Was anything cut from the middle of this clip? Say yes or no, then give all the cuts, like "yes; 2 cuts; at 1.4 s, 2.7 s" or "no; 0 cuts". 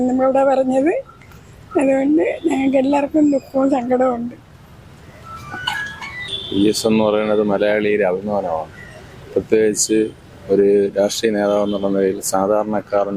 yes; 1 cut; at 6.3 s